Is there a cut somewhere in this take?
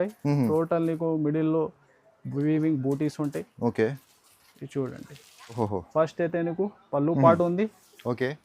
yes; 1 cut; at 5.6 s

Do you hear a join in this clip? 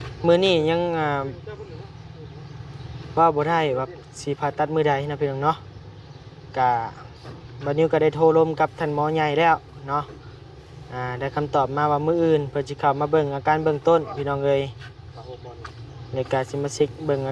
no; 0 cuts

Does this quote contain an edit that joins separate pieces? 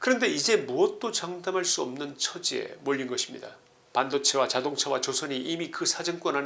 no; 0 cuts

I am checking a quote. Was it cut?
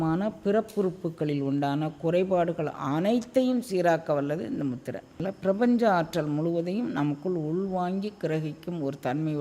yes; 1 cut; at 5.2 s

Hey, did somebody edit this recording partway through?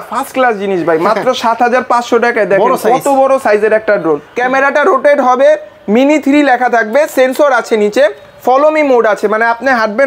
yes; 1 cut; at 4.3 s

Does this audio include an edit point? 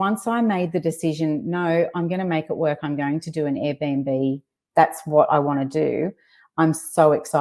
no; 0 cuts

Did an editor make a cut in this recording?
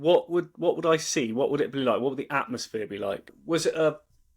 yes; 1 cut; at 3.4 s

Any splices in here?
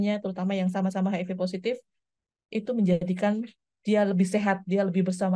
no; 0 cuts

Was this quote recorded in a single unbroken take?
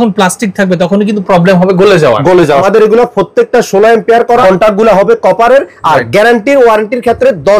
no; 2 cuts; at 2.6 s, 4.4 s

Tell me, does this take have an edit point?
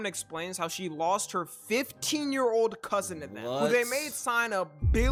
no; 0 cuts

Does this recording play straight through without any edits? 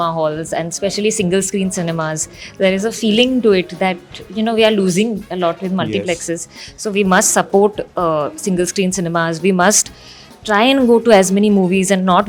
yes; 0 cuts

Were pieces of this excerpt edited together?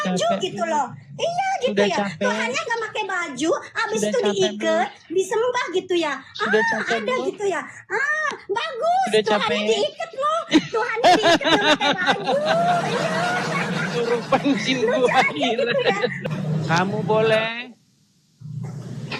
yes; 1 cut; at 16.2 s

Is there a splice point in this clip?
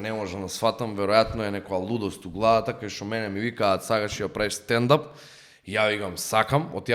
no; 0 cuts

